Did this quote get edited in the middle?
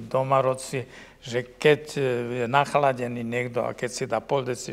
no; 0 cuts

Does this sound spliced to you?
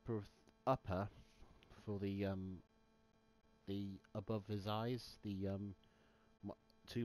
yes; 1 cut; at 1.2 s

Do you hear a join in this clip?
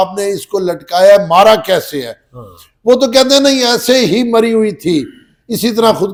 no; 0 cuts

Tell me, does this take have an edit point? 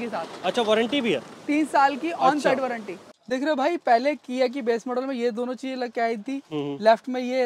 yes; 1 cut; at 3.0 s

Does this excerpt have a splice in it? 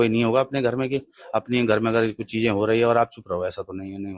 no; 0 cuts

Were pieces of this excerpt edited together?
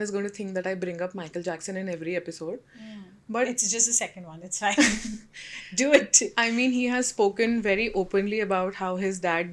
no; 0 cuts

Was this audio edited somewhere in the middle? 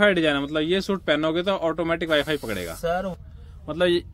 yes; 1 cut; at 3.1 s

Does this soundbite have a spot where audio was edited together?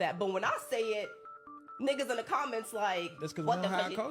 yes; 1 cut; at 2.6 s

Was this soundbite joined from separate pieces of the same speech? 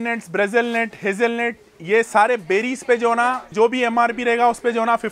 yes; 1 cut; at 3.5 s

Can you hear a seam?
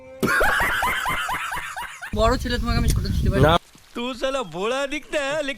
yes; 1 cut; at 2.1 s

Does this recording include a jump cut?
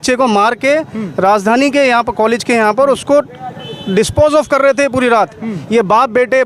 no; 0 cuts

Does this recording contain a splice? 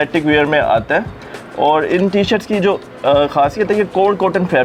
no; 0 cuts

